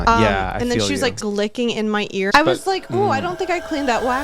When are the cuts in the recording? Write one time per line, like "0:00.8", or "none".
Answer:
0:01.2
0:02.3